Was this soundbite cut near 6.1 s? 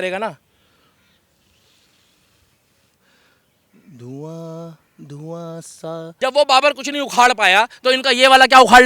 yes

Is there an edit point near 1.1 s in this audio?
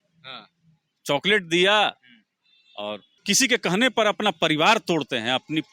no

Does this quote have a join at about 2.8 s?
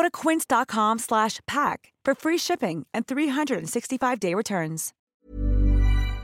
no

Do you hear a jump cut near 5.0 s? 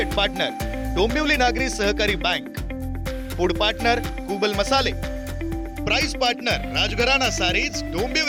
no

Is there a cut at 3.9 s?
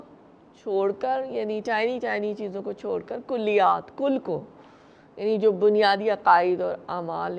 no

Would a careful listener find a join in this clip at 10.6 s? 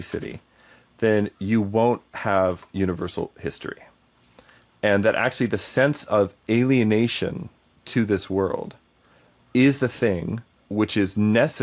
yes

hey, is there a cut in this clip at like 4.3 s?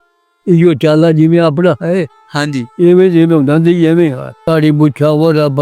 yes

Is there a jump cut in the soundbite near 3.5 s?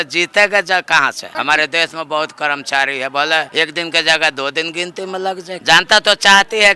yes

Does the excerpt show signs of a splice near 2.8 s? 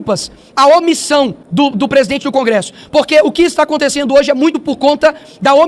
no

